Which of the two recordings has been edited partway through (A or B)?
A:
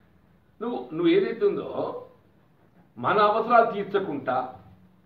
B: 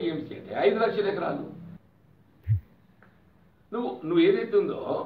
B